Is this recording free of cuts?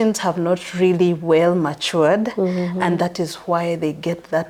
yes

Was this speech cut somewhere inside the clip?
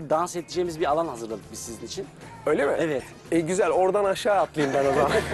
no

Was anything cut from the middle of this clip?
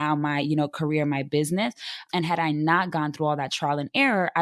no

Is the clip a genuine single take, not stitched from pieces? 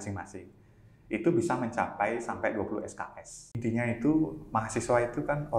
no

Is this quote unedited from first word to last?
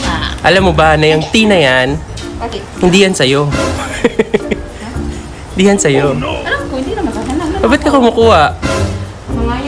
yes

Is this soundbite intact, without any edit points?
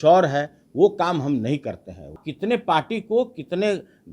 no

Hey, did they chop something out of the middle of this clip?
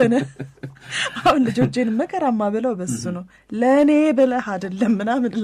no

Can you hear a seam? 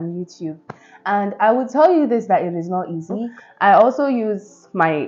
yes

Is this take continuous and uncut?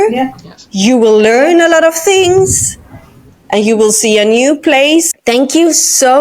no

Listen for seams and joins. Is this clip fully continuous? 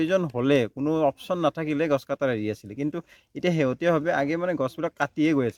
yes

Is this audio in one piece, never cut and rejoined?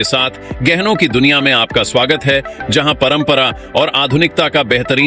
yes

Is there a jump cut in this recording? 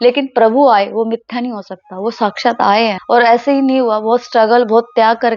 yes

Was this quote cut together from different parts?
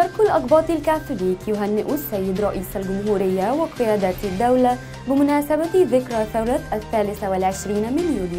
no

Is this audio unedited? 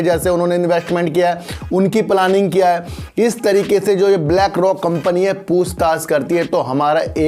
yes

